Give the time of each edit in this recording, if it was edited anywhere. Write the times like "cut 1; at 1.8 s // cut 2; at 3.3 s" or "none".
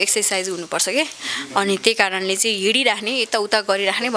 none